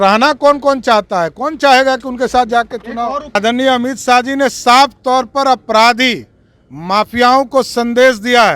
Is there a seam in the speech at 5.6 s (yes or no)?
no